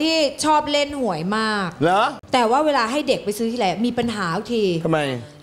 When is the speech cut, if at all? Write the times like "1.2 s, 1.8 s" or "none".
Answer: 2.2 s